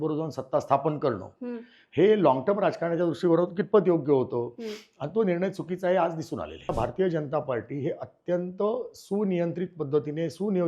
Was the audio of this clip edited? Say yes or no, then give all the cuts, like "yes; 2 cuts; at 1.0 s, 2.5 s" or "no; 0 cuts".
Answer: yes; 1 cut; at 6.7 s